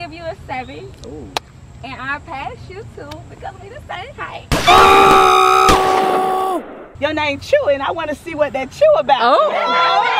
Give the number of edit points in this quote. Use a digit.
1